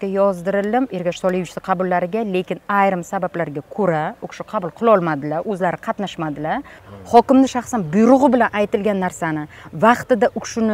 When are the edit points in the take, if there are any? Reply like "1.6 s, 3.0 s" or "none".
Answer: 6.8 s